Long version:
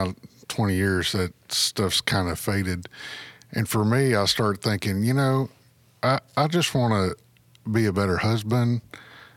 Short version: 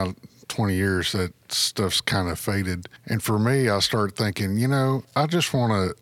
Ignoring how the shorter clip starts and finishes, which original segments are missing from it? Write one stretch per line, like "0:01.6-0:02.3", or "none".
0:02.9-0:03.4
0:05.5-0:06.3

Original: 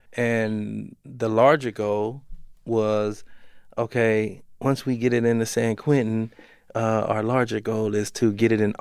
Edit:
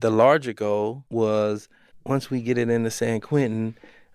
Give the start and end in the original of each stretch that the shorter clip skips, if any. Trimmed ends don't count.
0:02.2-0:02.6
0:03.4-0:04.4

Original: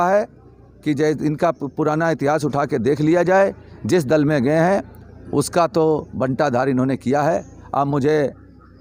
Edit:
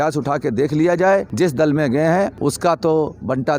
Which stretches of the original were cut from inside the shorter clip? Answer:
0:03.6-0:03.8
0:04.9-0:05.3

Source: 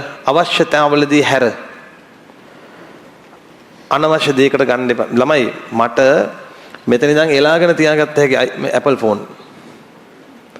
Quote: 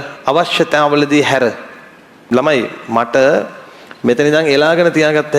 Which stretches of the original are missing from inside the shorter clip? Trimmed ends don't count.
0:02.3-0:05.1

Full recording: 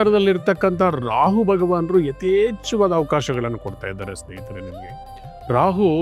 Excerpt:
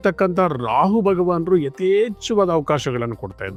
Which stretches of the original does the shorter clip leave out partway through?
none

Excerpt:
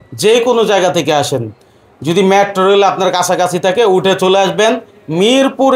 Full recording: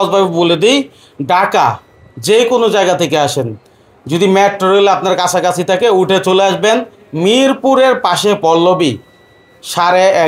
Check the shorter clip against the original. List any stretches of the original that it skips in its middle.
none

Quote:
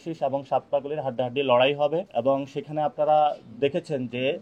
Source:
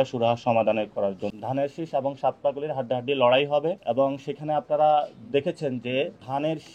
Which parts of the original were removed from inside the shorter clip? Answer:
none

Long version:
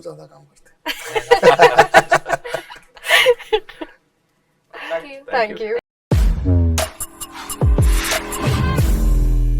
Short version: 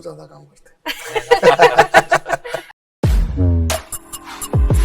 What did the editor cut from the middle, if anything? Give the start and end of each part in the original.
0:02.9-0:05.9

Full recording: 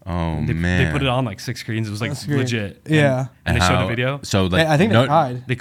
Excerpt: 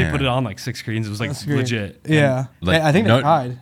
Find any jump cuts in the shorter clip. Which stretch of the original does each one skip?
0:03.4-0:04.5

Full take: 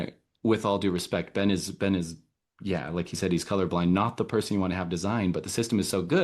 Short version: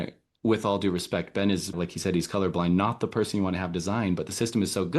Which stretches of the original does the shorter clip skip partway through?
0:01.7-0:02.9

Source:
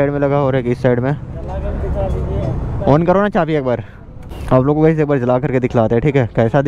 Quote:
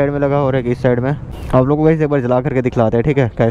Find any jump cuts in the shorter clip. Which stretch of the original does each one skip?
0:01.3-0:04.3

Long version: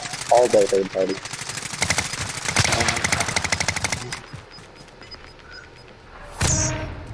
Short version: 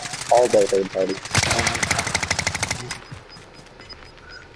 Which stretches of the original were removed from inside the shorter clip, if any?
0:01.2-0:02.5

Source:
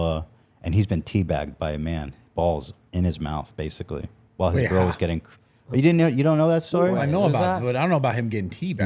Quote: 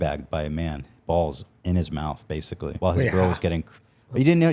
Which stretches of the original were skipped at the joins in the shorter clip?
0:04.0-0:04.3

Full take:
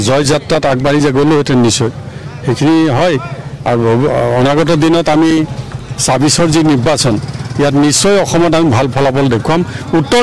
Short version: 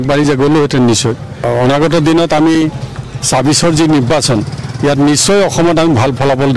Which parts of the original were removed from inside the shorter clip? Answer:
0:02.2-0:04.2

